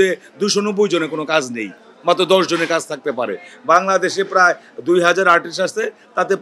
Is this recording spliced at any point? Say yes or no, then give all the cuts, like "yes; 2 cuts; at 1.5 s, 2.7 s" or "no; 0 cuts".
no; 0 cuts